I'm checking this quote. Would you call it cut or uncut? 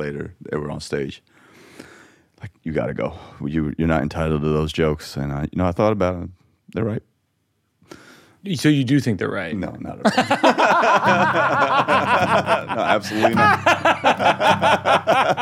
uncut